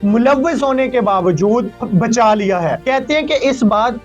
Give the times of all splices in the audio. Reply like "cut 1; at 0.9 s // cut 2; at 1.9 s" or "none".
cut 1; at 1.8 s // cut 2; at 2.8 s